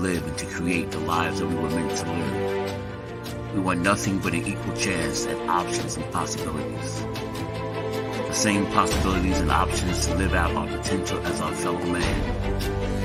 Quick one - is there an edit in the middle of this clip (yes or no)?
no